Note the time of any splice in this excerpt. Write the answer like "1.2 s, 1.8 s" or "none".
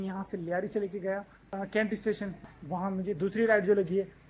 1.4 s, 2.4 s

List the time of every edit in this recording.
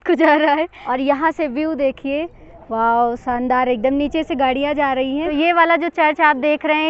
0.8 s, 5.2 s

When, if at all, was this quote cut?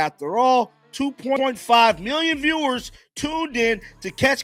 none

